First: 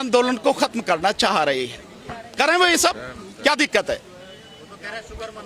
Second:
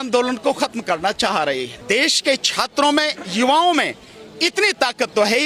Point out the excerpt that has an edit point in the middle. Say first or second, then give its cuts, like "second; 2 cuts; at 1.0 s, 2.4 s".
second; 1 cut; at 1.7 s